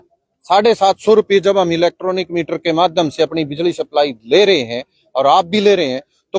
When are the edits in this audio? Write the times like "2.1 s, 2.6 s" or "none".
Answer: none

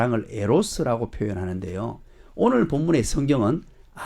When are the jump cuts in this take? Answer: none

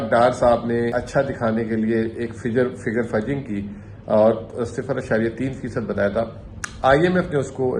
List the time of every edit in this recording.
0.9 s

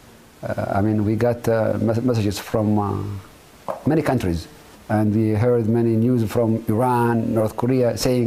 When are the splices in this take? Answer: 5.5 s

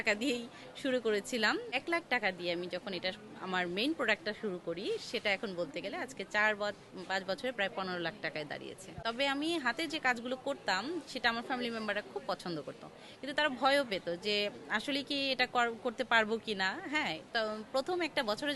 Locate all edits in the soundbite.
1.7 s, 8.9 s

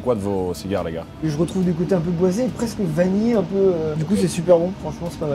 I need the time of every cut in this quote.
1.3 s, 3.9 s

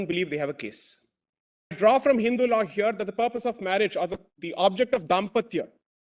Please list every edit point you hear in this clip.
1.8 s

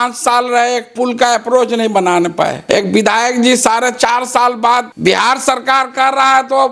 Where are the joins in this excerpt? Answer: 2.6 s, 4.9 s

